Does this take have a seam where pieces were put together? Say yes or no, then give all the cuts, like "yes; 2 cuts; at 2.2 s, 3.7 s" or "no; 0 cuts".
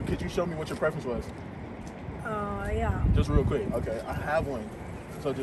no; 0 cuts